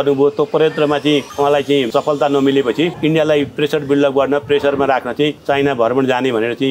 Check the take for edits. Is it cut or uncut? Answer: cut